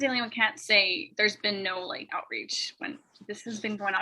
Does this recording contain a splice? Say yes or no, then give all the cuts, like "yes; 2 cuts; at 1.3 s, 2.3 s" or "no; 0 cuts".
yes; 1 cut; at 1.0 s